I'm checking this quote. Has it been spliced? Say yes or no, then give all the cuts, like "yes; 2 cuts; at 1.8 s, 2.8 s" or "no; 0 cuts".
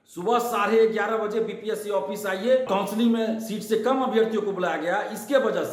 yes; 1 cut; at 2.7 s